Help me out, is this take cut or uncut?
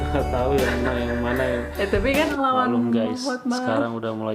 cut